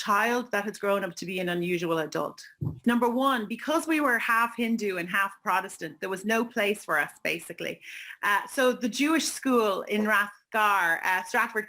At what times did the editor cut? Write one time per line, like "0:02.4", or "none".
0:02.8